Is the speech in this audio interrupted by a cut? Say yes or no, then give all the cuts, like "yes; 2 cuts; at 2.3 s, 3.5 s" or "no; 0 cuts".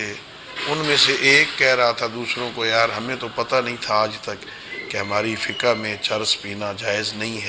no; 0 cuts